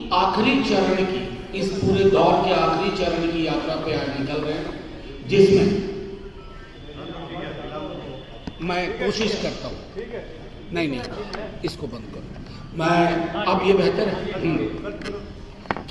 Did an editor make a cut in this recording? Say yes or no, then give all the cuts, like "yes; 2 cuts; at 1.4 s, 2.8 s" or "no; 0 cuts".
no; 0 cuts